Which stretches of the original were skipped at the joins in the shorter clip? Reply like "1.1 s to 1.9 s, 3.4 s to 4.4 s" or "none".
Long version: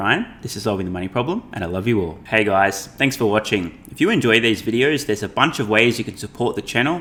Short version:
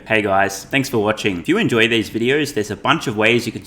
3.2 s to 3.5 s